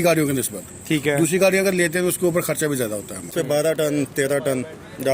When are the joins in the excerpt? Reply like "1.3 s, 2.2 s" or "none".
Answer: 3.3 s